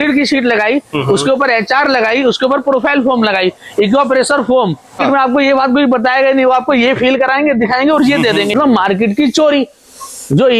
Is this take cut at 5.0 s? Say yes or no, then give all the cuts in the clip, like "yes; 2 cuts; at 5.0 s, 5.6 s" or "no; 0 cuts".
yes; 2 cuts; at 5.0 s, 8.5 s